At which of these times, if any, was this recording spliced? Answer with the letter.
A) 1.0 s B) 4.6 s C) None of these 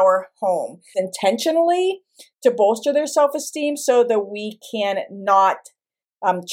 A